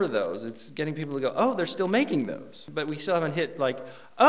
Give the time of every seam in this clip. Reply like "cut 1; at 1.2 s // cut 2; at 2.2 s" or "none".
cut 1; at 2.7 s